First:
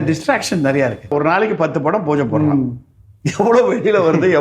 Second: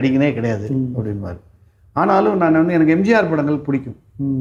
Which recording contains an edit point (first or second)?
first